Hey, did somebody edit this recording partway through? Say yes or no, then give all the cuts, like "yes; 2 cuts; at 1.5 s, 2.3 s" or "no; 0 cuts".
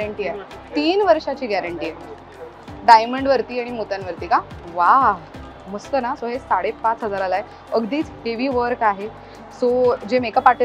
no; 0 cuts